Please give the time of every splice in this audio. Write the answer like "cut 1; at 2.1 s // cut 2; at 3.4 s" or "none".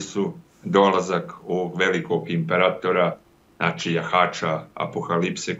none